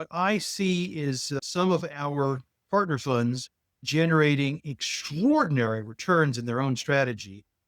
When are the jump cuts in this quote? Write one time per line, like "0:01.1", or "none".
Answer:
0:01.3
0:03.9